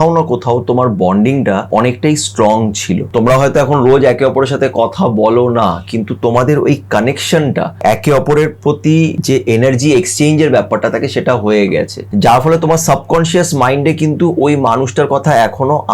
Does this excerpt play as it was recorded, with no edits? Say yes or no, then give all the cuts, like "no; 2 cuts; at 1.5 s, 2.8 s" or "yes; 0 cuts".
no; 5 cuts; at 1.6 s, 3.0 s, 7.7 s, 9.2 s, 12.0 s